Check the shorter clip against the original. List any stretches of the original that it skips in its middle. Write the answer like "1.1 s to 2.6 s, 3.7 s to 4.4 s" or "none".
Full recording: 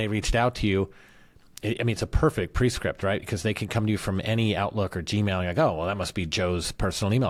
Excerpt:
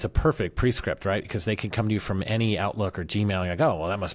none